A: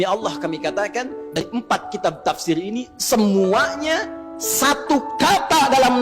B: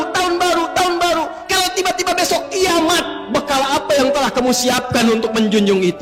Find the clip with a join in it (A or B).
A